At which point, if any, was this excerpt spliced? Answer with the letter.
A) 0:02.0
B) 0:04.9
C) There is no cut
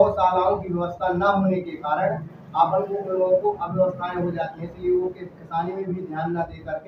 C